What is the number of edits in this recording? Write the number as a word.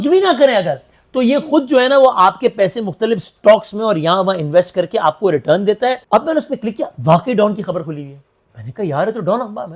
one